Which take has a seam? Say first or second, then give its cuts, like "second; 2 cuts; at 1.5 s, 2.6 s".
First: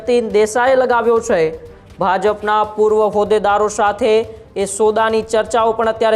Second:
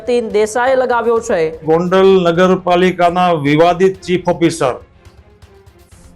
second; 1 cut; at 1.6 s